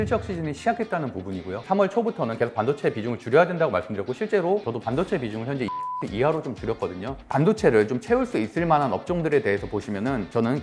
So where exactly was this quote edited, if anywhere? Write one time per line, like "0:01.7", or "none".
0:01.6
0:07.2

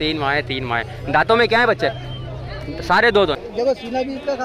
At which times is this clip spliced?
0:03.5

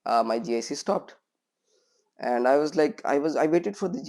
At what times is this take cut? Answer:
none

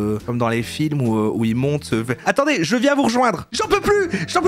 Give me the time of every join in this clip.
0:03.5

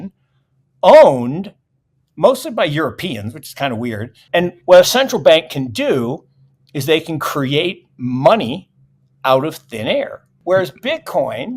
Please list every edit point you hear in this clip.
0:04.1
0:10.7

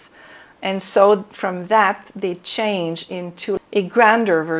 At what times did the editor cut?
0:03.6

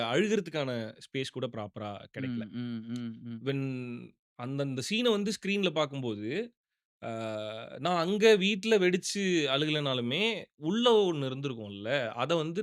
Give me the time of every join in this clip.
none

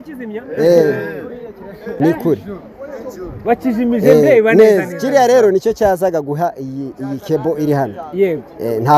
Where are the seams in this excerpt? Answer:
0:01.8

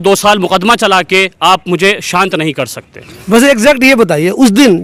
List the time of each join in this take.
none

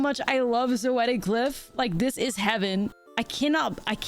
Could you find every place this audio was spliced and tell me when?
0:03.0

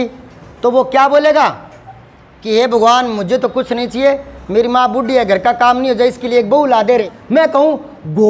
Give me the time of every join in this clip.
0:07.1

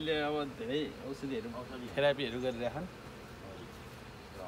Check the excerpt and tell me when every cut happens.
none

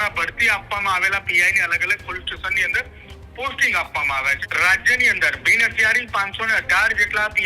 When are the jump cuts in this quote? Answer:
0:04.4

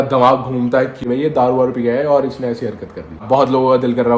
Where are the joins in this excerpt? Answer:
0:01.0
0:03.2

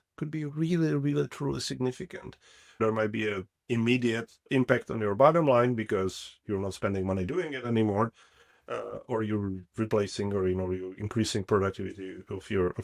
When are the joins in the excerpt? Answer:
0:02.8
0:04.3

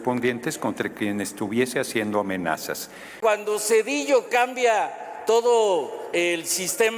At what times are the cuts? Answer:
0:03.2

